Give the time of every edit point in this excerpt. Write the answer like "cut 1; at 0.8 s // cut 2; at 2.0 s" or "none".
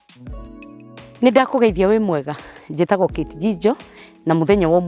cut 1; at 1.1 s